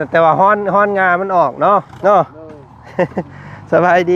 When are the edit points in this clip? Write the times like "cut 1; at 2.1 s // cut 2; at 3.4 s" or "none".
cut 1; at 1.9 s